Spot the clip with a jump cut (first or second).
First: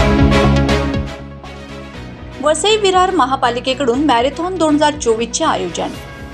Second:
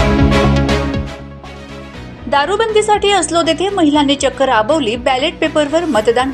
second